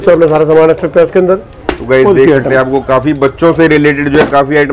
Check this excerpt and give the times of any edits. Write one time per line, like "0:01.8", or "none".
none